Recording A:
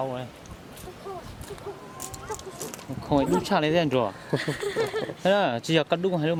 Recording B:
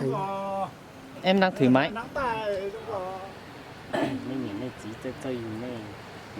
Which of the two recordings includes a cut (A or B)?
B